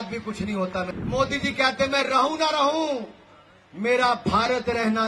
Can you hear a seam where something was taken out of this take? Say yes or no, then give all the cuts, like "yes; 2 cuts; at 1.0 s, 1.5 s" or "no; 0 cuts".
yes; 1 cut; at 0.9 s